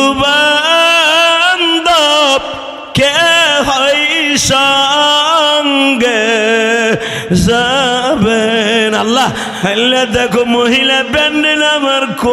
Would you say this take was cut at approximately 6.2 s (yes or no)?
no